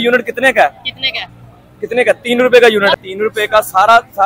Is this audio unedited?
no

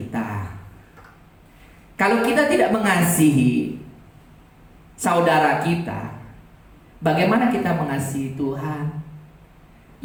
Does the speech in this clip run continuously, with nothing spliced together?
yes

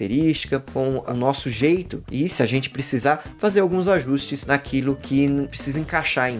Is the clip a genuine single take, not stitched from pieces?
no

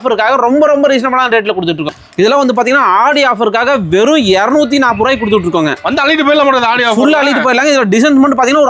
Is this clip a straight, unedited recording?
no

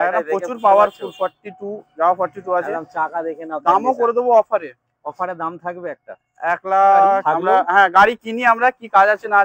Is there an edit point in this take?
yes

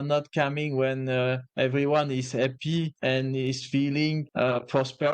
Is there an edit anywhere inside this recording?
yes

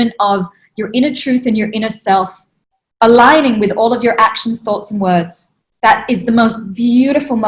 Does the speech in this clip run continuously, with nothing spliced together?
yes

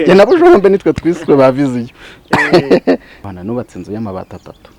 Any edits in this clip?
yes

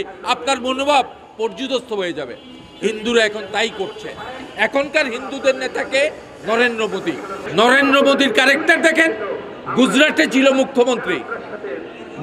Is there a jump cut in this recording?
no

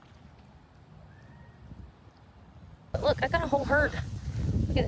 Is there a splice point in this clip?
yes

